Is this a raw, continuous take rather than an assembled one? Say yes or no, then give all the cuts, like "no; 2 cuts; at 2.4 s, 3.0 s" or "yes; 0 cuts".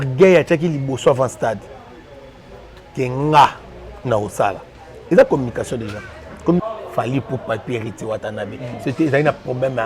no; 1 cut; at 6.6 s